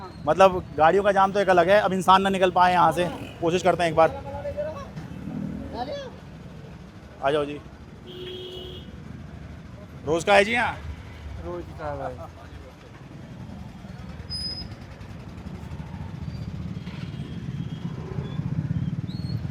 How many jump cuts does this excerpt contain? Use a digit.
0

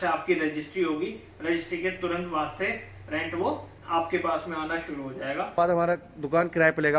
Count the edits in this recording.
1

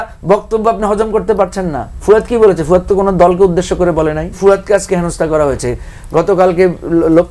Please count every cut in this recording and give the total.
1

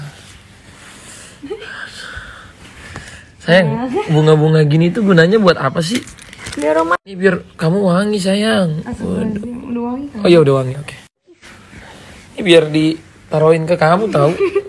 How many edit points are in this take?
2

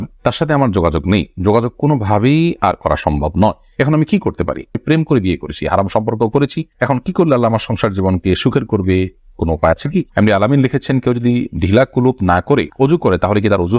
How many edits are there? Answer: 2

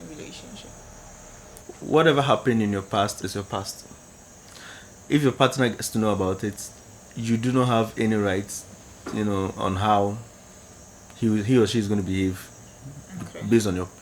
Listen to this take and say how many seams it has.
1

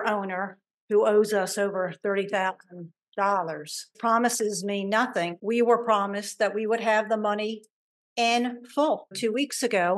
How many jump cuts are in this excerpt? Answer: 3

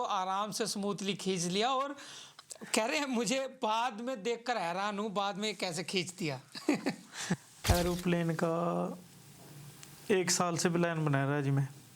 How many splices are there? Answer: 1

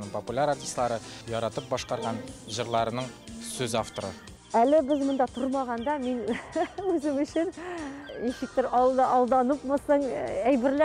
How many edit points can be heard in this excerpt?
3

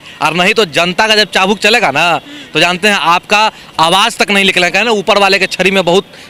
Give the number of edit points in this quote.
0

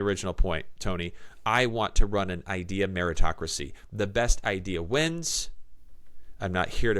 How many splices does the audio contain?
0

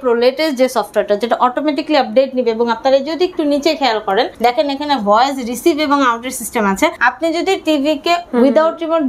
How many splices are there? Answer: 3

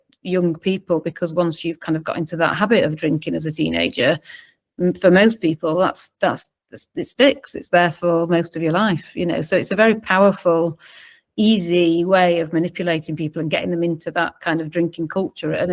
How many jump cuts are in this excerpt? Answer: 0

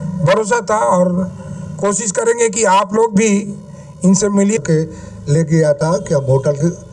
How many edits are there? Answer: 1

